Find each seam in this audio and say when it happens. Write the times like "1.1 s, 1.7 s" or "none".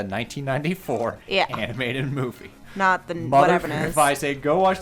3.7 s

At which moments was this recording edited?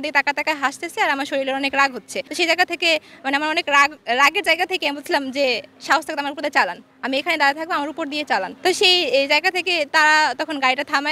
none

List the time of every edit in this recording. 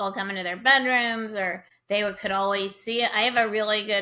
1.7 s

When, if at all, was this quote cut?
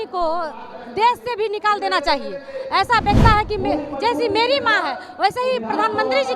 3.2 s

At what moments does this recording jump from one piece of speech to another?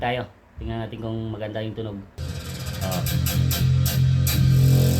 2.2 s

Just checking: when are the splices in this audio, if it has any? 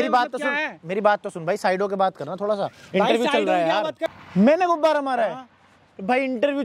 4.0 s

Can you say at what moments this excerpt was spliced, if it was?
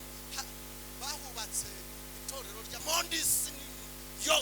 2.8 s

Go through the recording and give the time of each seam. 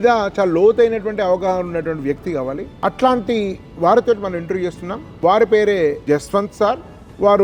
none

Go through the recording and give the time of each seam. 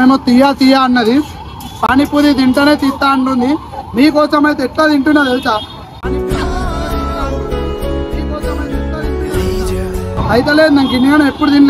none

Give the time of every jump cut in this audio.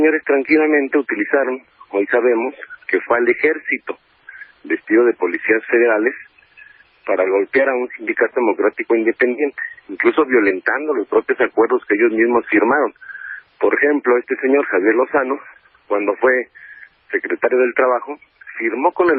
10.7 s

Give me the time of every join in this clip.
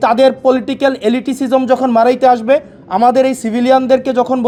none

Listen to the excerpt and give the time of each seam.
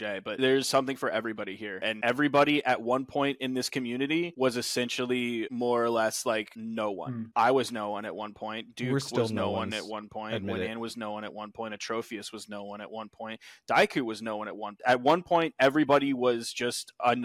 14.8 s

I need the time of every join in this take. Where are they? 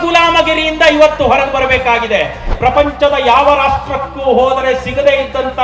2.5 s

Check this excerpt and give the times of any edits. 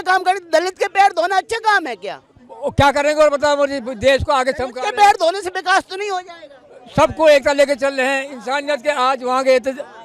none

